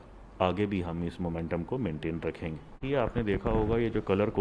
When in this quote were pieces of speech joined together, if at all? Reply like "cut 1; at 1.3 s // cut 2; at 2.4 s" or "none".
cut 1; at 2.9 s

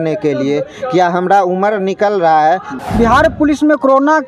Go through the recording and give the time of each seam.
cut 1; at 2.8 s

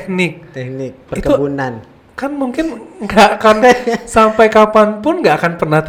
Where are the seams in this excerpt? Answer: none

